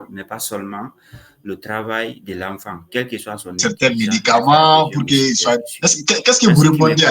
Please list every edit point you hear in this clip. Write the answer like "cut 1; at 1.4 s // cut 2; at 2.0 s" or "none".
cut 1; at 3.6 s